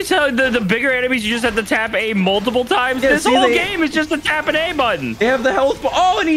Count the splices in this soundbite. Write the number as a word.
zero